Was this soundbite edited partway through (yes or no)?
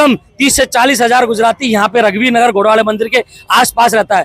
no